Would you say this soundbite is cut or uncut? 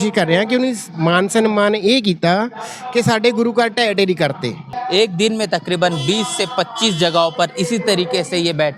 cut